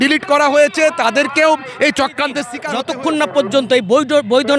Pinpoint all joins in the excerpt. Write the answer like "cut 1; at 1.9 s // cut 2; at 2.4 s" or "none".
cut 1; at 2.5 s

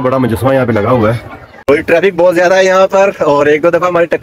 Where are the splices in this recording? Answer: cut 1; at 1.5 s

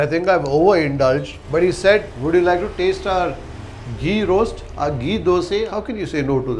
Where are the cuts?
cut 1; at 5.7 s

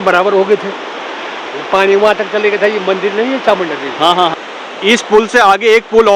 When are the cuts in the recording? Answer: cut 1; at 4.4 s

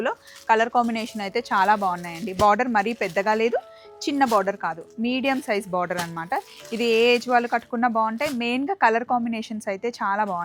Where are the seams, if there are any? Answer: none

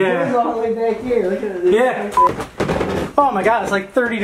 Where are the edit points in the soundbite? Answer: cut 1; at 2.3 s

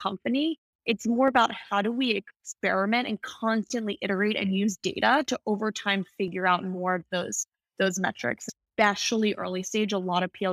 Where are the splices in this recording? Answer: cut 1; at 8.4 s

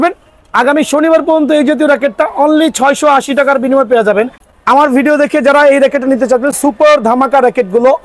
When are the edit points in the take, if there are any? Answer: cut 1; at 4.4 s

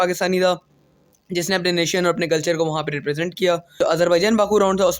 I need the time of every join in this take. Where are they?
cut 1; at 3.8 s

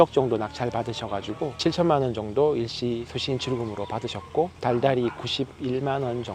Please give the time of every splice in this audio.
cut 1; at 1.6 s

